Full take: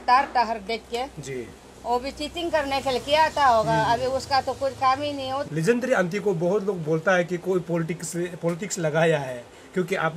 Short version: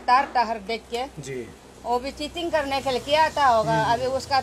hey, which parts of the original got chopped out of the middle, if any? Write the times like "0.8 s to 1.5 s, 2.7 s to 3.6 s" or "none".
none